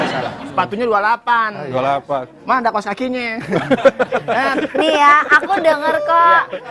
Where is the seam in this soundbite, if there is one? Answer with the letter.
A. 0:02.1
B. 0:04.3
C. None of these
B